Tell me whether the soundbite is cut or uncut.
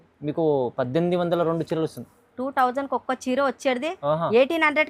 uncut